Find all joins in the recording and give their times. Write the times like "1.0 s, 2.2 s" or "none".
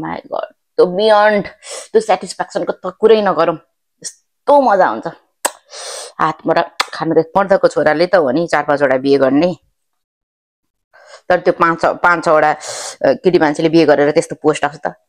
7.3 s